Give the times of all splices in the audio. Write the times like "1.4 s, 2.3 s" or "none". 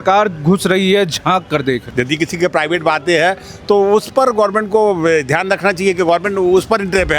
1.9 s

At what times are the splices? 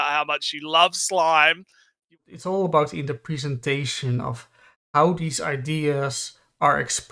2.1 s

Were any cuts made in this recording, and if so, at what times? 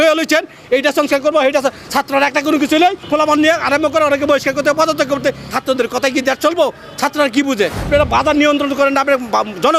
3.0 s, 5.5 s, 7.8 s

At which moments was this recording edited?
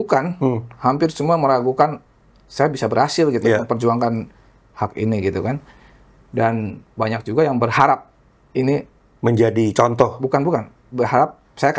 none

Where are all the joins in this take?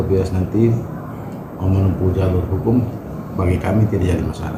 none

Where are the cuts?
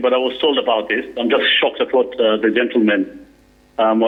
none

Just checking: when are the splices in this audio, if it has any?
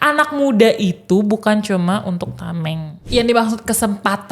3.0 s

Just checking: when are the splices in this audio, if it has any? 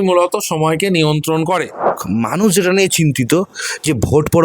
2.0 s

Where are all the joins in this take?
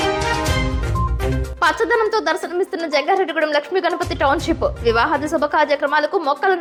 none

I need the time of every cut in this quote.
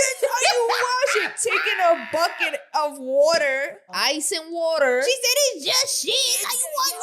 3.9 s

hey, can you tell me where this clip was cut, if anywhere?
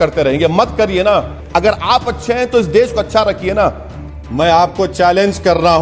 1.4 s, 4.2 s

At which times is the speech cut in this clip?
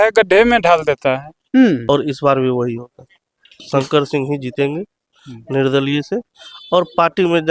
1.8 s

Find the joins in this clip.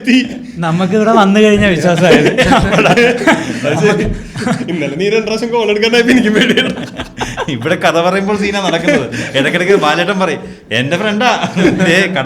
none

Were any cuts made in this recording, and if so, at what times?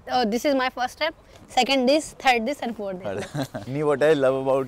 none

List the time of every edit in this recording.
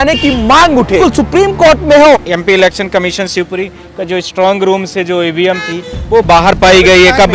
1.0 s, 2.2 s

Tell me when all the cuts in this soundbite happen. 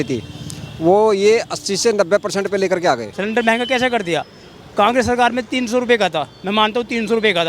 3.1 s

